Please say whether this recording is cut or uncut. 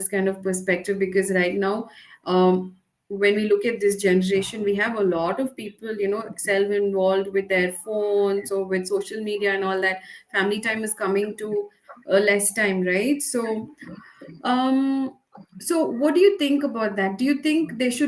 uncut